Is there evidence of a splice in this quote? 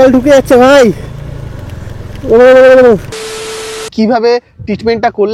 yes; 1 cut; at 3.6 s

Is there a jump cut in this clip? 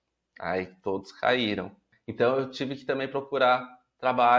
yes; 1 cut; at 2.0 s

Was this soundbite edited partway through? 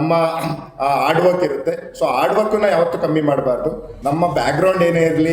yes; 1 cut; at 3.9 s

